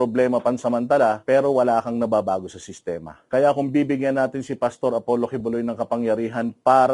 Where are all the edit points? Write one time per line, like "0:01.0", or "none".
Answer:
0:01.2
0:03.1